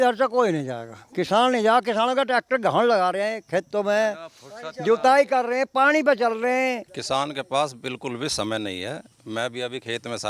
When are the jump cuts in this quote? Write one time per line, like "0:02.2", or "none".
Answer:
0:06.9